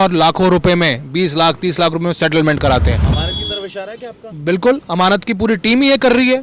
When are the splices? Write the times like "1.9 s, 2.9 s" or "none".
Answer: none